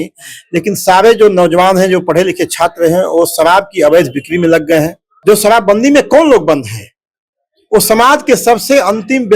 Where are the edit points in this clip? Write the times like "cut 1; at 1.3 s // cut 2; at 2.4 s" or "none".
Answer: cut 1; at 5.0 s